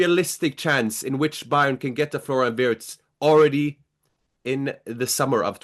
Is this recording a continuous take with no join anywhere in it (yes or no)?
yes